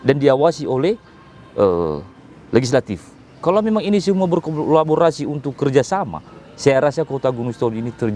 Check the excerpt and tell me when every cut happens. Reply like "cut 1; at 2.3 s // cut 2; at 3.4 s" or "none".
none

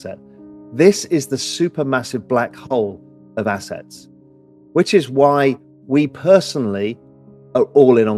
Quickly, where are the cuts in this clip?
none

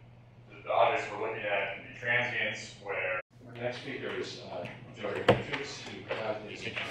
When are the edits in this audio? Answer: none

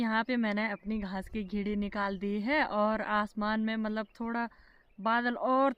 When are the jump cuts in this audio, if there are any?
none

